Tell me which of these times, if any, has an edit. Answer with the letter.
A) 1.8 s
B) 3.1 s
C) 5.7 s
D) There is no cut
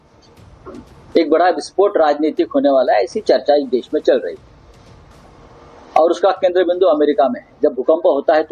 B